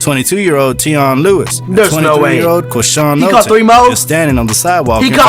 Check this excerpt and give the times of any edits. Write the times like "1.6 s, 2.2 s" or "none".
none